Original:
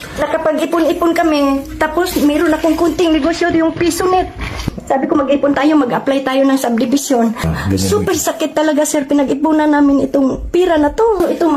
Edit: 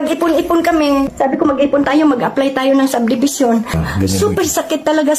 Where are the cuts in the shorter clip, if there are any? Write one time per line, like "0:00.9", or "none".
0:01.1